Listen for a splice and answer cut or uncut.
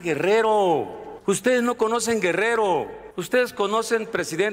uncut